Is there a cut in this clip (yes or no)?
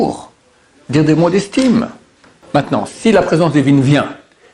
yes